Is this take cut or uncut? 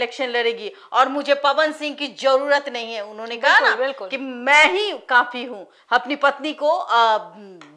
uncut